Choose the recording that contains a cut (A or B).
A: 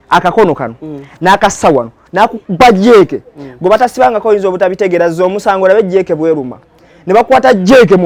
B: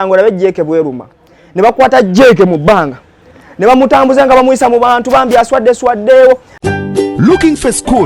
B